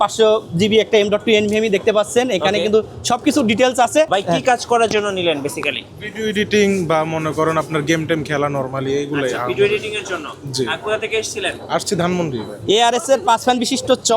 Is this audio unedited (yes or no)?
no